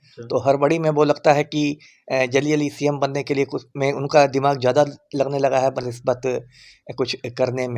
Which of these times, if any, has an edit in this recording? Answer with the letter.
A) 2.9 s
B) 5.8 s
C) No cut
C